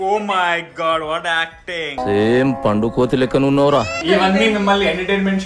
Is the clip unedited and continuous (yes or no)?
yes